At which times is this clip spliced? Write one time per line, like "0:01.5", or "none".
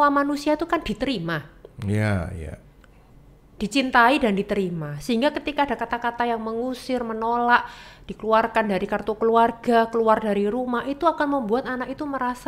none